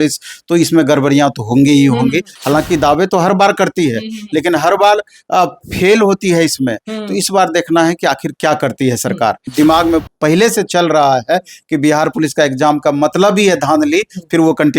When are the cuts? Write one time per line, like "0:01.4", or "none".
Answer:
0:02.3
0:09.5